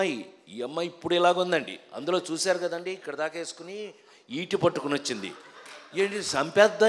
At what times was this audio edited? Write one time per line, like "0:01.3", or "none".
none

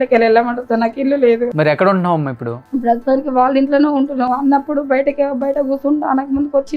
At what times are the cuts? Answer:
0:01.5
0:02.5

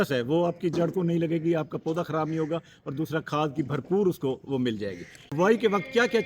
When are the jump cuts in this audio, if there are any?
0:05.2

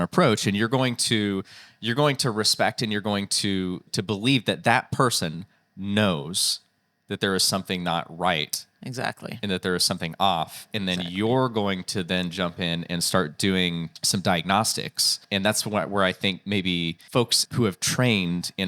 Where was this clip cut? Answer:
0:03.9
0:13.9
0:15.2
0:17.4

